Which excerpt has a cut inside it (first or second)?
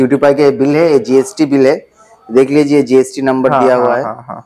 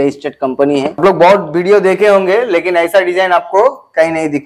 second